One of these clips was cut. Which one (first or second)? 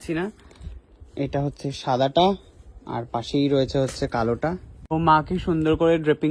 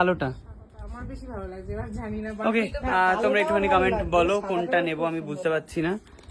first